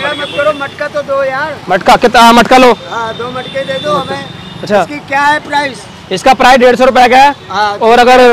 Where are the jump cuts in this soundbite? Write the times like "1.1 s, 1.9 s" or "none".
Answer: none